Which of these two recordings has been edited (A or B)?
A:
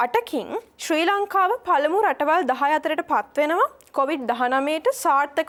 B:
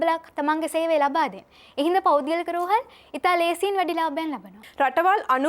B